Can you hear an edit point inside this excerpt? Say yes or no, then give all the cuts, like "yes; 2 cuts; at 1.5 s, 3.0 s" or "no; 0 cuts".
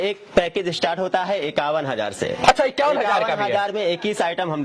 no; 0 cuts